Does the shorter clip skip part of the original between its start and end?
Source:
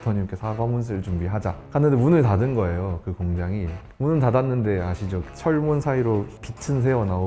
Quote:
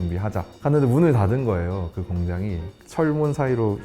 yes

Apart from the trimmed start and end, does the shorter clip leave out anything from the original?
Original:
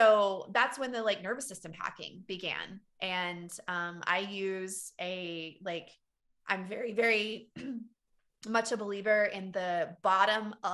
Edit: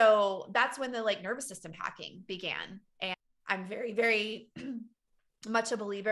yes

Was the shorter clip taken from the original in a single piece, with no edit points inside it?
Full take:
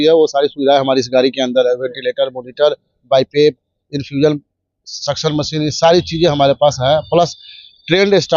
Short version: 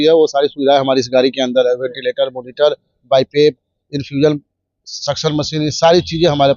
yes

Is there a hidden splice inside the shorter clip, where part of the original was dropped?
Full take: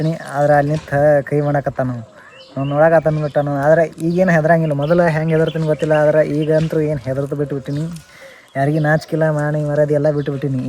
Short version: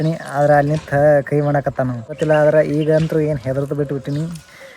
yes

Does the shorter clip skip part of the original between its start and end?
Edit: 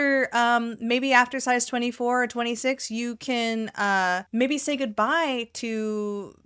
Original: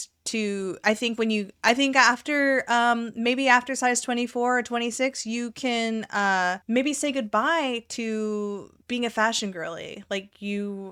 no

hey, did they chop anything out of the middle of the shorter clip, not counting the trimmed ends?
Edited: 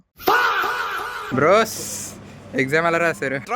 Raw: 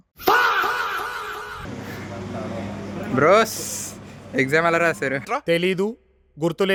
yes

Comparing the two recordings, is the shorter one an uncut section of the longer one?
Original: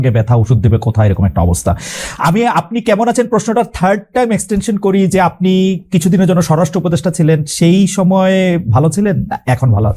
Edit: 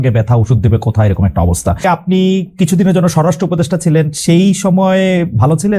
no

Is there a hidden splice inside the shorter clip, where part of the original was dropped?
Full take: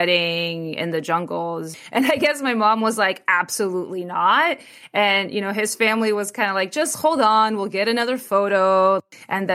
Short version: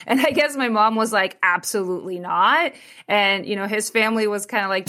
no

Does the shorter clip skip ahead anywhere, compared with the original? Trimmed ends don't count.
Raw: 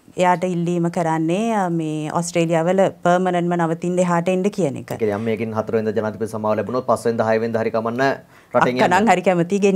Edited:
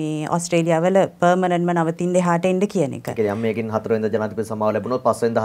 no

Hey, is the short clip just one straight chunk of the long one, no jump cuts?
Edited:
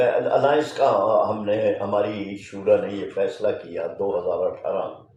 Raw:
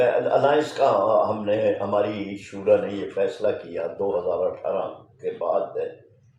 yes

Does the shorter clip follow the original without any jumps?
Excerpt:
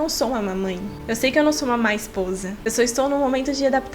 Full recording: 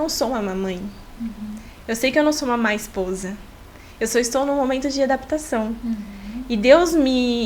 no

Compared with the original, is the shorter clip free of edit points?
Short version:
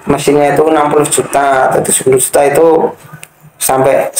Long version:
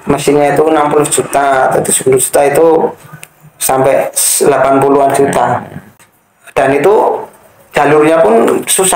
yes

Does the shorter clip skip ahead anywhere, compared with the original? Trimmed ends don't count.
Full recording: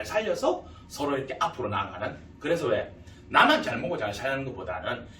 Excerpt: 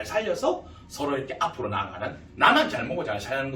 yes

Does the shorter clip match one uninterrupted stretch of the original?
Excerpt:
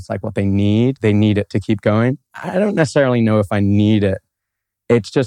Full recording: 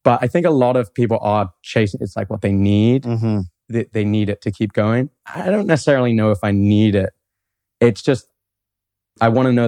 no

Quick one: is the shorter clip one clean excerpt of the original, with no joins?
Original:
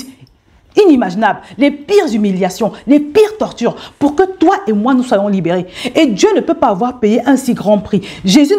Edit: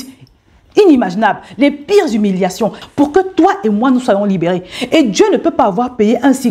no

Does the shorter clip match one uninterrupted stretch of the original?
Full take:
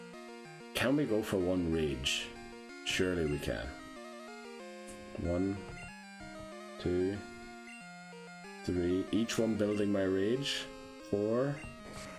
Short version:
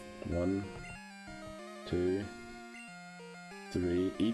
yes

